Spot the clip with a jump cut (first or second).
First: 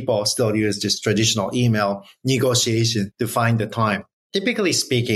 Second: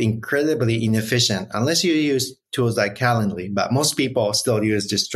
first